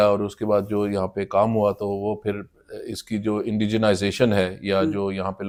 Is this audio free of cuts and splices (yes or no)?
yes